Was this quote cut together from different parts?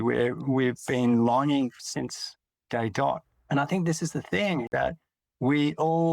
yes; 2 cuts; at 3.3 s, 4.7 s

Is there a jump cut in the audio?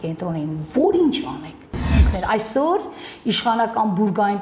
yes; 1 cut; at 2.0 s

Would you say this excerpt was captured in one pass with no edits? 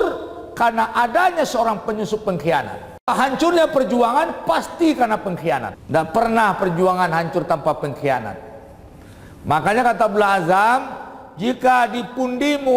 no; 2 cuts; at 3.1 s, 5.8 s

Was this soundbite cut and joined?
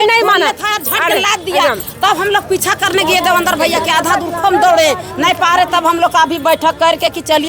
no; 0 cuts

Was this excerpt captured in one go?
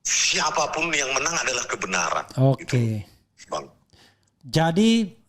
yes; 0 cuts

